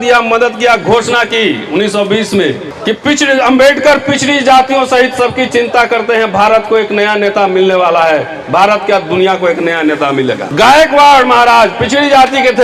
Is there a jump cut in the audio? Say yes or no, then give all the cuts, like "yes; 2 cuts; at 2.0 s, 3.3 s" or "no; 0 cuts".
yes; 2 cuts; at 2.7 s, 10.4 s